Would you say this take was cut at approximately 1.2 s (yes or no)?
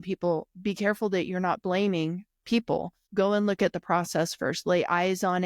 no